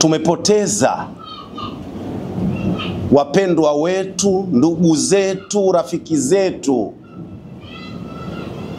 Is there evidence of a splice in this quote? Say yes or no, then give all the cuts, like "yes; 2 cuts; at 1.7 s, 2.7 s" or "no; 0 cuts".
no; 0 cuts